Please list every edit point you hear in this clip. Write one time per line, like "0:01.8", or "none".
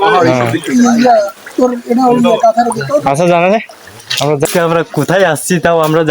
0:04.5